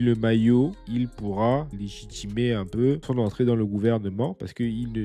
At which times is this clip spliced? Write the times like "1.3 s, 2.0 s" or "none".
none